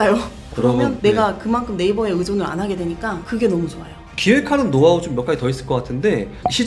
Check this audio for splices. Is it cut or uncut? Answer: cut